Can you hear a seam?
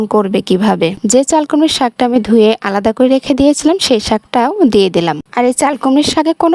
yes; 1 cut; at 1.0 s

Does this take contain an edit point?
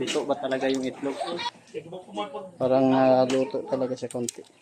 yes; 1 cut; at 1.4 s

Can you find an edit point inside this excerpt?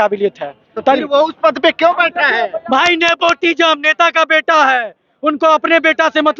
no; 0 cuts

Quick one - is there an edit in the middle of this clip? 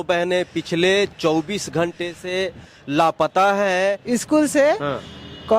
yes; 1 cut; at 4.0 s

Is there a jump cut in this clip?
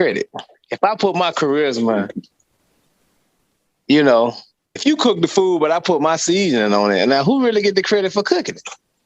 yes; 1 cut; at 4.8 s

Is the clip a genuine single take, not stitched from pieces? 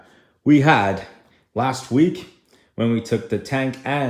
yes; 0 cuts

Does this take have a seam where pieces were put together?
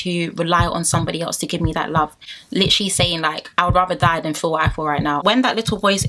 yes; 2 cuts; at 2.3 s, 5.2 s

